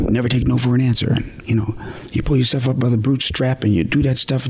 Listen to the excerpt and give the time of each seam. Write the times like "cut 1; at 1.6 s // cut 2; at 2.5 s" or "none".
cut 1; at 1.4 s